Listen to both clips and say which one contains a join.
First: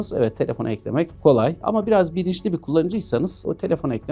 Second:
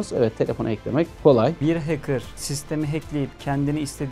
second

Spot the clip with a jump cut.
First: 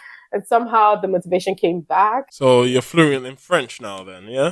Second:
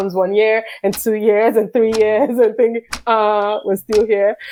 first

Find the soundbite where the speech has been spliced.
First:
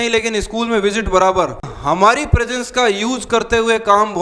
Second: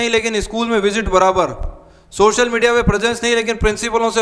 first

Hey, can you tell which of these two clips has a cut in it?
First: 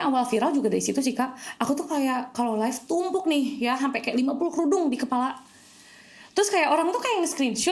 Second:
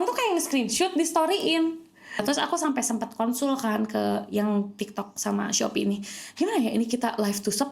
second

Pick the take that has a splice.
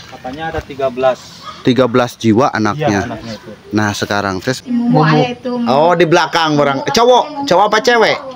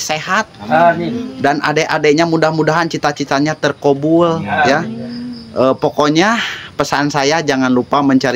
first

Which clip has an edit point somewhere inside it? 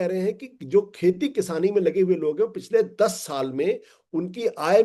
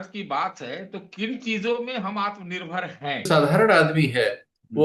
second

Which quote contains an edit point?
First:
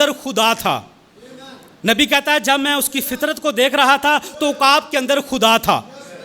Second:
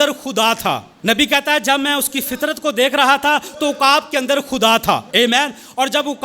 second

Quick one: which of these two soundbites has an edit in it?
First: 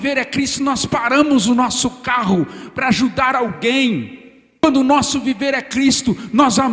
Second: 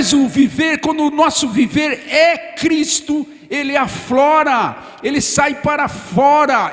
first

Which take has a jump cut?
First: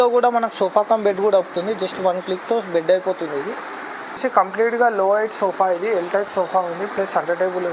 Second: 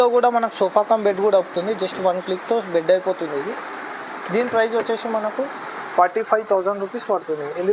first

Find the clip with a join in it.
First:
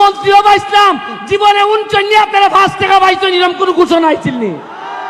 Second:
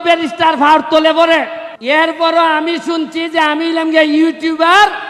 second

